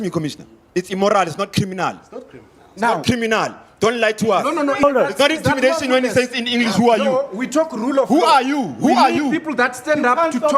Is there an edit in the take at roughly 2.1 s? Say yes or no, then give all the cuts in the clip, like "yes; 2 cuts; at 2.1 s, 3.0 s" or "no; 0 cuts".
no; 1 cut; at 4.8 s